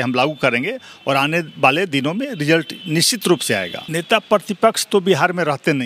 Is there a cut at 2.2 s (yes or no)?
no